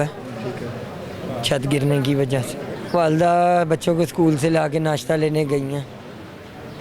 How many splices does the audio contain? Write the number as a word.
one